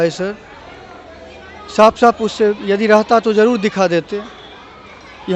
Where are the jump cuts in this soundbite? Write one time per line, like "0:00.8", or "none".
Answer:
none